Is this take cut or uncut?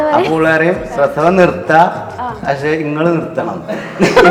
uncut